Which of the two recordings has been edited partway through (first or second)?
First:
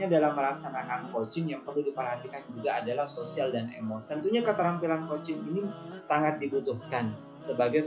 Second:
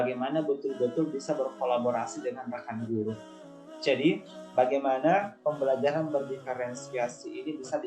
first